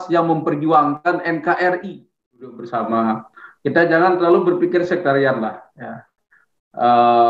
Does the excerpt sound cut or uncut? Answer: cut